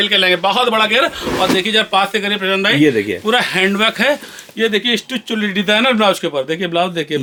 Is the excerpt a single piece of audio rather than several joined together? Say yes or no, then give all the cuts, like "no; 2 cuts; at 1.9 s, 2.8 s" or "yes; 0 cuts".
yes; 0 cuts